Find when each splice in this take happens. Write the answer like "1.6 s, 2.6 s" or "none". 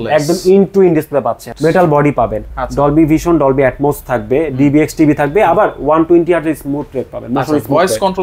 1.5 s